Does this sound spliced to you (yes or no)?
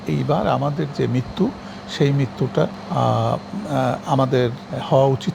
no